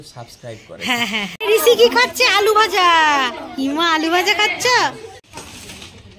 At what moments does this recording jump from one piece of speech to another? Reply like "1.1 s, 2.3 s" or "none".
1.4 s, 5.3 s